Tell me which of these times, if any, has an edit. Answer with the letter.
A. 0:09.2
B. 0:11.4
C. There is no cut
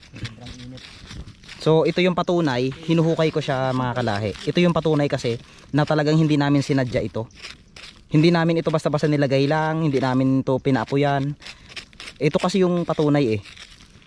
C